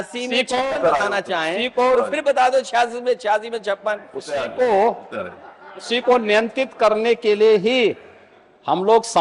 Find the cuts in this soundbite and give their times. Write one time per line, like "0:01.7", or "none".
none